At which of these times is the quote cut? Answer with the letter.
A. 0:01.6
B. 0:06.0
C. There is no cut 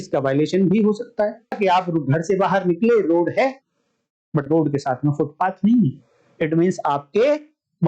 A